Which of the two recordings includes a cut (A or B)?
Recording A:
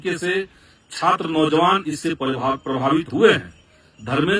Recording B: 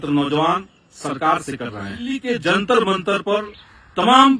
B